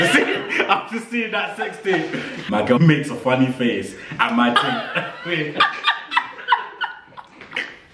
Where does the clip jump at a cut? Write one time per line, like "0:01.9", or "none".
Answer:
0:02.4